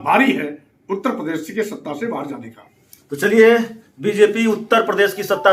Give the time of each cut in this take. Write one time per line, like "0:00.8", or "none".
none